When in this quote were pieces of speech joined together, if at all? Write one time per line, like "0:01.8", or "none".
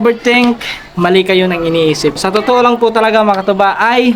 0:02.3